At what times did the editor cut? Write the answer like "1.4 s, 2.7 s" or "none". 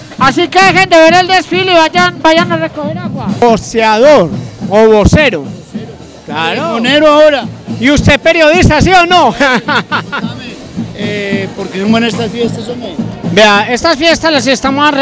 3.4 s